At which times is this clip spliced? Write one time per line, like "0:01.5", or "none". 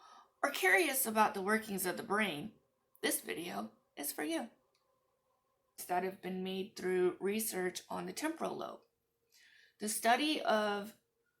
0:05.8